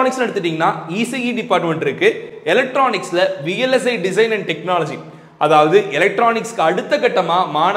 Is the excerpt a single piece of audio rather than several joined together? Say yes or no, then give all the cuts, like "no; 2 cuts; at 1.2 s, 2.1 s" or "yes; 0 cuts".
yes; 0 cuts